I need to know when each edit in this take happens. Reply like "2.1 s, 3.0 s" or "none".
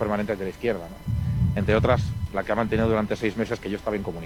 none